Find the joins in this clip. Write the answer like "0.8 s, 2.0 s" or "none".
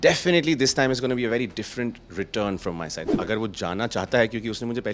3.1 s